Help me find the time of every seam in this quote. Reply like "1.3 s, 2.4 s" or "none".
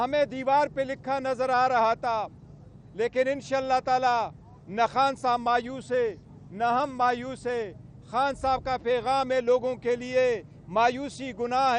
none